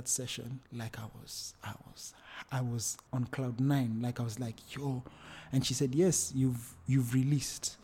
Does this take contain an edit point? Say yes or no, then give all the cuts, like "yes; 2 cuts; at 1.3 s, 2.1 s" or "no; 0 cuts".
no; 0 cuts